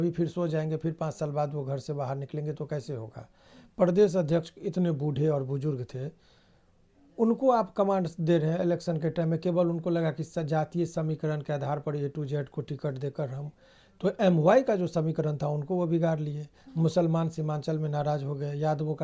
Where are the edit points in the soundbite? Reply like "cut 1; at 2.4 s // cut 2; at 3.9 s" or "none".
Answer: none